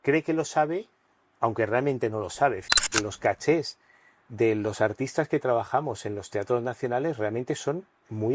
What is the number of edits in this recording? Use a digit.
1